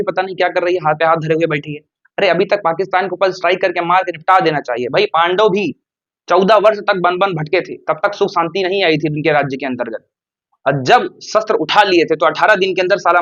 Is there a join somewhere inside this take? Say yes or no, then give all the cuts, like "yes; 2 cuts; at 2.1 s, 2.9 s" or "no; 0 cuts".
no; 0 cuts